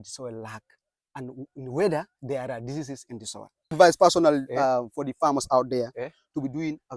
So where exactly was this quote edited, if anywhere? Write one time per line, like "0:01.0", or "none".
0:03.7